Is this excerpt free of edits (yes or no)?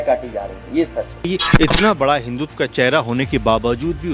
no